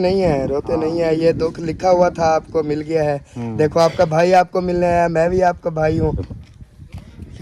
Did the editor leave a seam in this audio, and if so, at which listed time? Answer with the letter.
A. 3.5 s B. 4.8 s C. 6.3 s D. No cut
C